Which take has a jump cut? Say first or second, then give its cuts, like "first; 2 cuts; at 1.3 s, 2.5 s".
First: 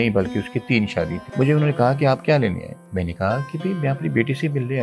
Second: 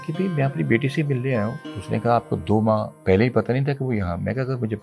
first; 1 cut; at 1.2 s